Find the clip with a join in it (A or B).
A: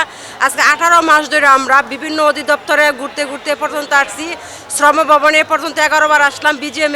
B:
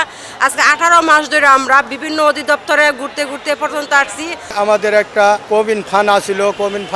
B